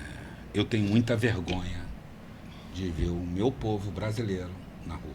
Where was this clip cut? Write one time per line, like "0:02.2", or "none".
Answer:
none